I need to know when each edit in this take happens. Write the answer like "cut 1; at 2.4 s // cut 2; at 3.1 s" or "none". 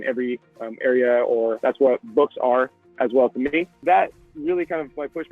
cut 1; at 1.6 s // cut 2; at 3.8 s